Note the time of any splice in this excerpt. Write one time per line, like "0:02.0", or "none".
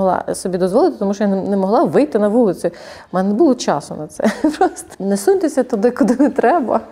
0:04.8